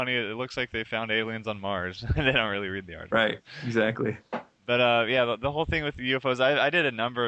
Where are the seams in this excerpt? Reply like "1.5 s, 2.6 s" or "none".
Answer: none